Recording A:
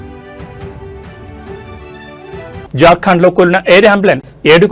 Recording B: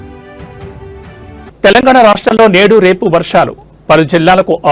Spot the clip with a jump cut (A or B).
B